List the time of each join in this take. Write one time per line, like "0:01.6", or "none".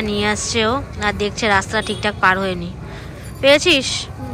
none

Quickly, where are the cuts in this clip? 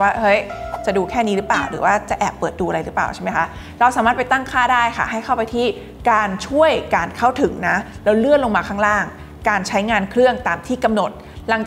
none

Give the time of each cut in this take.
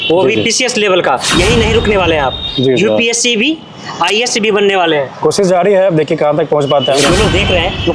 0:01.3
0:05.1
0:07.0

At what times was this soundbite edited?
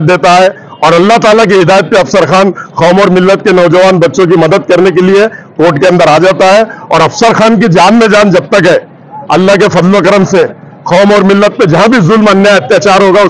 none

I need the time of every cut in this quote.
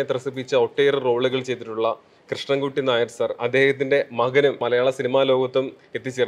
0:04.6

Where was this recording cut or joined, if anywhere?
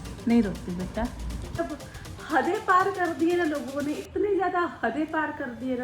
0:01.6

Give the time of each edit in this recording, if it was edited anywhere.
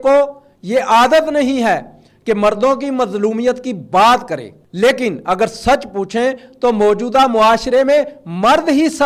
none

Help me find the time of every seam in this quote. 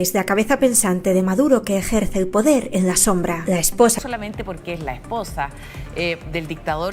0:03.9

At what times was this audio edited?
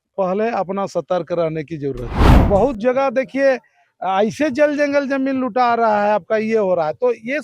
0:02.3

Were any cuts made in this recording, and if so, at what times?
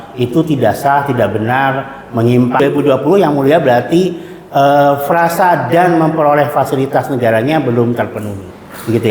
0:02.6

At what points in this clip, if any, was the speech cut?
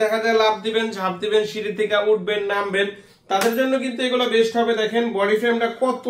none

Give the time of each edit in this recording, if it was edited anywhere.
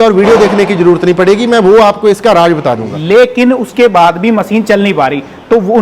0:02.9

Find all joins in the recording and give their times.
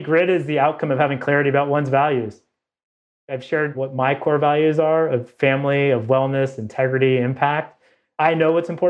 0:03.8

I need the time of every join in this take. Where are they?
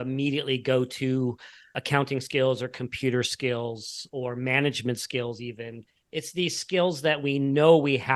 none

